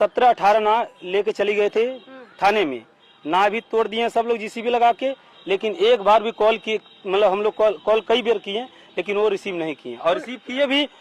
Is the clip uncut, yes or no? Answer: yes